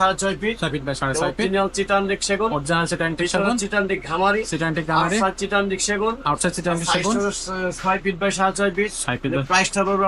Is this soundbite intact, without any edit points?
yes; 0 cuts

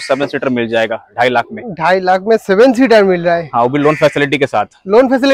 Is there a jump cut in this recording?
no; 0 cuts

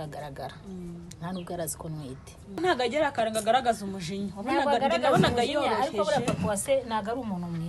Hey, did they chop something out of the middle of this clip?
yes; 1 cut; at 2.6 s

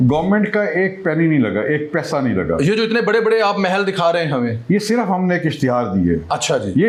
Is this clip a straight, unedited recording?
yes; 0 cuts

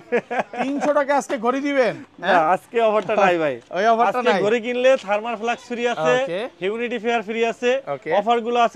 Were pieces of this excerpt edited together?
no; 0 cuts

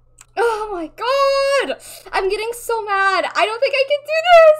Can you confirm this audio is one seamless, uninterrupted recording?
yes; 0 cuts

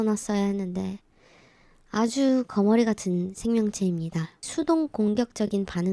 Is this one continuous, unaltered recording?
no; 1 cut; at 4.5 s

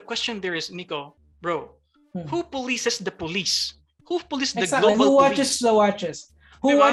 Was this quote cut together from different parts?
no; 0 cuts

